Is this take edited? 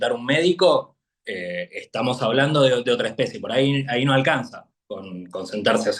no; 0 cuts

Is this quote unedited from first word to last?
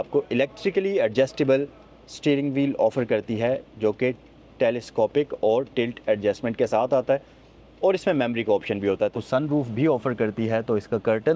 no; 1 cut; at 9.1 s

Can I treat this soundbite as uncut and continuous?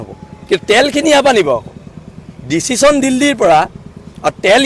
yes; 0 cuts

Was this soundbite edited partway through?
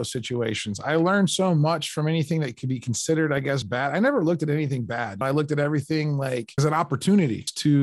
no; 0 cuts

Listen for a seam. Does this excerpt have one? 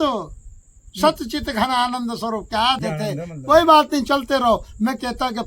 yes; 1 cut; at 2.8 s

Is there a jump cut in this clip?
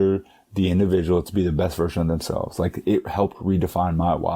no; 0 cuts

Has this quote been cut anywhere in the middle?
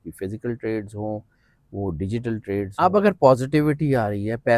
yes; 1 cut; at 2.7 s

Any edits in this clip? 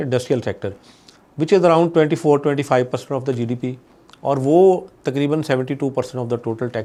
no; 0 cuts

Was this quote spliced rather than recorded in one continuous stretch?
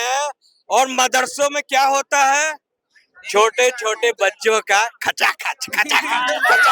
no; 0 cuts

